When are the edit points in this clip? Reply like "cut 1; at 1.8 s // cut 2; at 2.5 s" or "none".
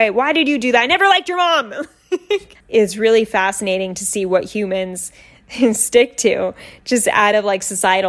cut 1; at 2.6 s